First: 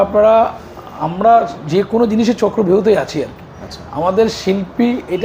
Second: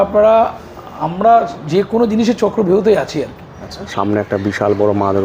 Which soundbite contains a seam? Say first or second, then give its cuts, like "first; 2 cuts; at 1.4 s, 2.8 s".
second; 1 cut; at 3.9 s